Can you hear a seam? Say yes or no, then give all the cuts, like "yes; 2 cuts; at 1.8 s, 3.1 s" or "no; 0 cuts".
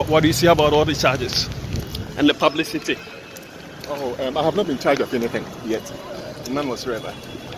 no; 0 cuts